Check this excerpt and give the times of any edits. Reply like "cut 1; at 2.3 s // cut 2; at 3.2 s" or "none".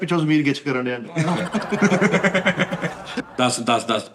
cut 1; at 3.2 s